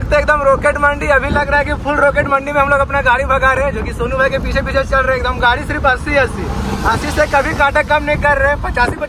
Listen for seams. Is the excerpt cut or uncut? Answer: uncut